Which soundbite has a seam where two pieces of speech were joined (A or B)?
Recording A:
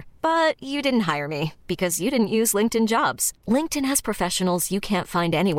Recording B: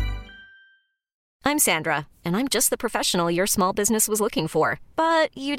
B